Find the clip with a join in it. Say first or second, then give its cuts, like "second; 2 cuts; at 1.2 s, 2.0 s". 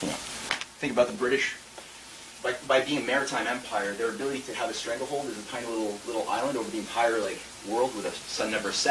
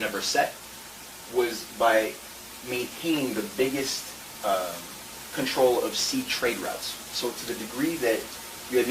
second; 1 cut; at 7.4 s